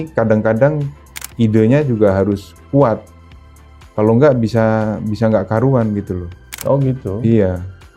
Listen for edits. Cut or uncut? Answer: uncut